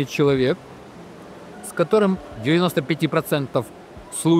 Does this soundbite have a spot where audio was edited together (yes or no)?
yes